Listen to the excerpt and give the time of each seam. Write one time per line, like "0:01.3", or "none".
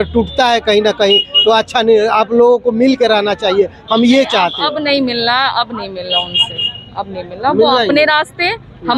none